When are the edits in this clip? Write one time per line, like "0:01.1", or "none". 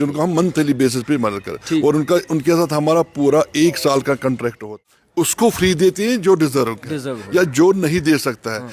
0:05.3